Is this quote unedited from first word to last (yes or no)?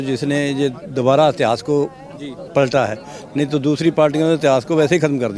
yes